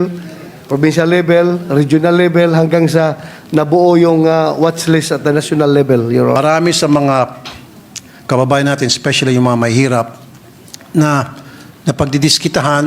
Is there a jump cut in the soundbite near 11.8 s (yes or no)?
no